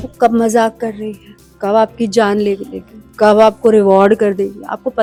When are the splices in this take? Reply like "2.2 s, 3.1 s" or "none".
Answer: none